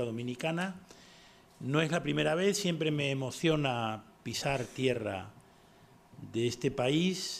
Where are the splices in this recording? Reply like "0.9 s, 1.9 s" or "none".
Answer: none